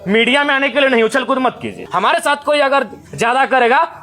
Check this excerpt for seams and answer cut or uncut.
cut